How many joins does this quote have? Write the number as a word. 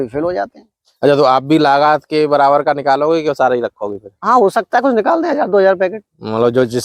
zero